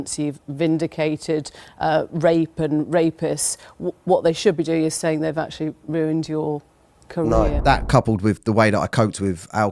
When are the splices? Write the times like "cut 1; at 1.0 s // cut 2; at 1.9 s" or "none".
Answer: cut 1; at 7.6 s